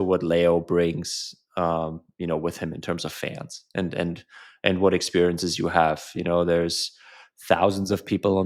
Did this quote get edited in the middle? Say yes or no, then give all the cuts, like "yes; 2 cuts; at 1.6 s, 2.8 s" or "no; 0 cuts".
no; 0 cuts